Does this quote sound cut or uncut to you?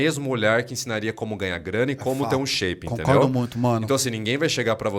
uncut